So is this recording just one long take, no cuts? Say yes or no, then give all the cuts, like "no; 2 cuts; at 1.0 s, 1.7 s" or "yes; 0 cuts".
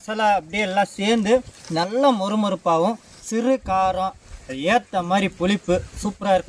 no; 2 cuts; at 1.6 s, 4.2 s